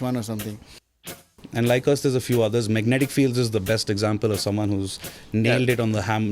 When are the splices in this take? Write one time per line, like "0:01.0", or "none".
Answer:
0:01.3